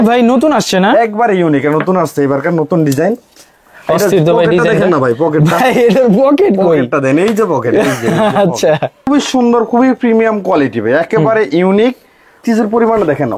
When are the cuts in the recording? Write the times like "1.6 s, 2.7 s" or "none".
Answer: 9.1 s, 12.4 s